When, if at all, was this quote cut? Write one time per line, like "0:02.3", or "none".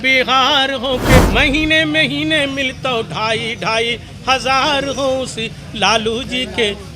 0:01.2